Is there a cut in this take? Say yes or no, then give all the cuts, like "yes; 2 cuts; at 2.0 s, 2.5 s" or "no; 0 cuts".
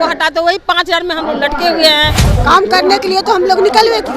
yes; 1 cut; at 2.3 s